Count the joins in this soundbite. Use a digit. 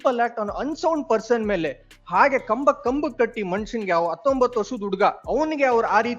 1